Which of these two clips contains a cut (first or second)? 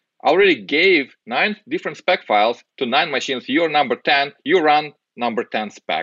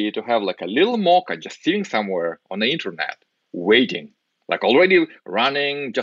first